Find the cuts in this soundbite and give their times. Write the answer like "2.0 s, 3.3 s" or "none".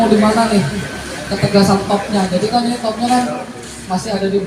none